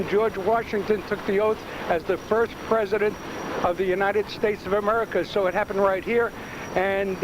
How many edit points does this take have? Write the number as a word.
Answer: one